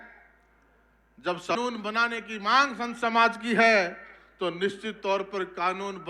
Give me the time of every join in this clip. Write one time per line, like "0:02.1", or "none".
0:01.6